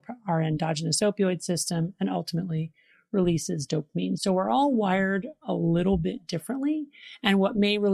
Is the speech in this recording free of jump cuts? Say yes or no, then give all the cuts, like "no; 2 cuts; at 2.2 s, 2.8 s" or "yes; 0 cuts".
no; 1 cut; at 4.2 s